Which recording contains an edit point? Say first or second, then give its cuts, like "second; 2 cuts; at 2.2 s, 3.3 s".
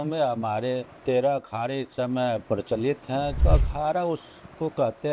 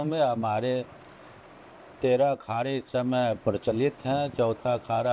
first; 2 cuts; at 0.9 s, 3.4 s